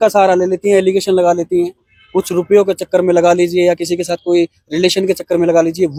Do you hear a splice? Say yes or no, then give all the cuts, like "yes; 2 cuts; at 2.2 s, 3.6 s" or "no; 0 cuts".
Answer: no; 0 cuts